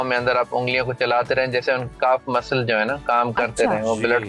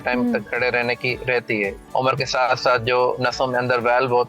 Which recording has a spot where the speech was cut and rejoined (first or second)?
second